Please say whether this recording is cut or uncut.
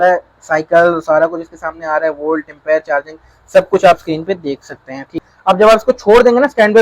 cut